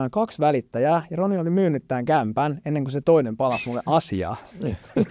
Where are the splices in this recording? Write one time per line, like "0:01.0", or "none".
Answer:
none